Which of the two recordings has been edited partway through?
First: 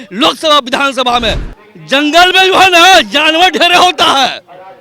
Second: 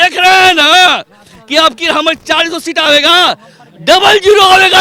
first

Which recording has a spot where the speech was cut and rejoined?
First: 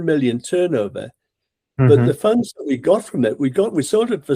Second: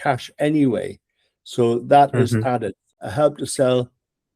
second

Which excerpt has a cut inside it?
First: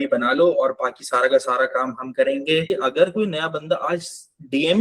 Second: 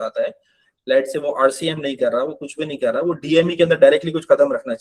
first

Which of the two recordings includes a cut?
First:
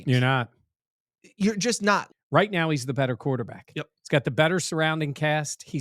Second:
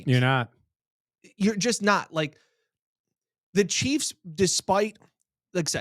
first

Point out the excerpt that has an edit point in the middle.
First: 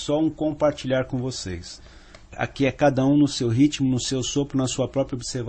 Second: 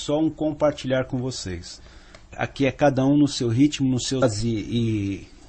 first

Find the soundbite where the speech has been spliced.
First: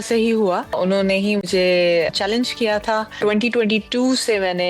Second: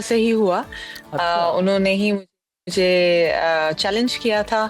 first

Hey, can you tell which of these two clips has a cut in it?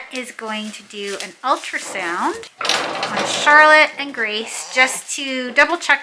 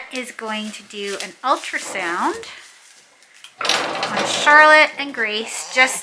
first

